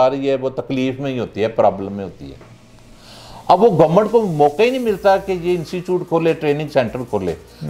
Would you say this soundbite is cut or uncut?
uncut